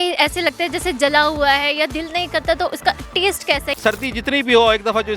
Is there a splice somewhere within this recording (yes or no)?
yes